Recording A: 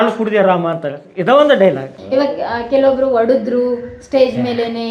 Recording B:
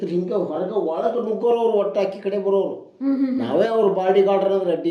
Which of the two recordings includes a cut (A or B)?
A